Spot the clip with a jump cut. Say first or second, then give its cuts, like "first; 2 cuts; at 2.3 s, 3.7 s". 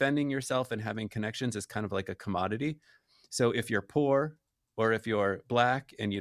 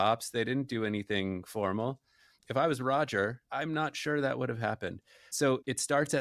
second; 3 cuts; at 2.5 s, 3.4 s, 5.4 s